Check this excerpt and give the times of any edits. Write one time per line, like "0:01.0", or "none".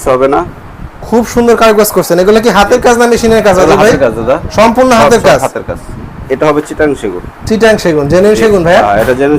0:06.2